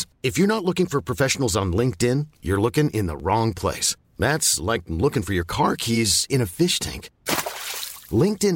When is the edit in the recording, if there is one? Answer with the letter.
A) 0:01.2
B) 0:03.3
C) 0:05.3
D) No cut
D